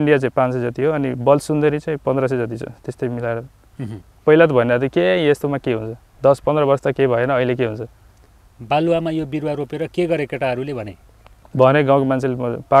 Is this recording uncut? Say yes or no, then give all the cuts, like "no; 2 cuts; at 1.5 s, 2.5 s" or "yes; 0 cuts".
no; 1 cut; at 4.0 s